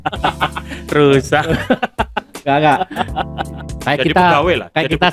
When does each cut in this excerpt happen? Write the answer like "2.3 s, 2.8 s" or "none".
3.5 s